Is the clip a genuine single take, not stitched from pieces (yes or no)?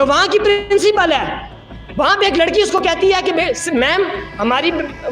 no